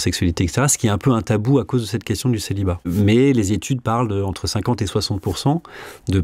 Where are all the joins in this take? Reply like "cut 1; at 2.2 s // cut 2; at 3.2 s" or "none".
cut 1; at 2.8 s

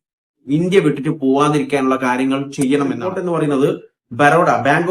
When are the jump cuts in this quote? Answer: cut 1; at 3.1 s

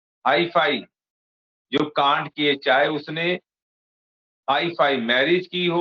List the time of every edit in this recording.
none

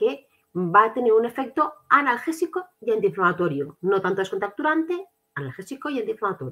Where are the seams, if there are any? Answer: none

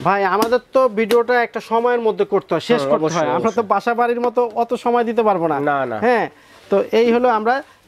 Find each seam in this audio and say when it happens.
none

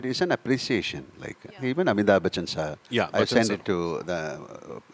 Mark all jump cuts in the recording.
none

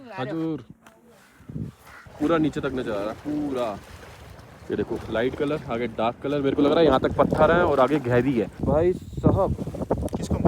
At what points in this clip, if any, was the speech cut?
cut 1; at 2.0 s // cut 2; at 8.5 s

